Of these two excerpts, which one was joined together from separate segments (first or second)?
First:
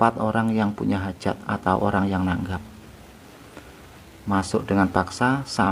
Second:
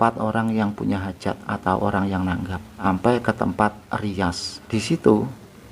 second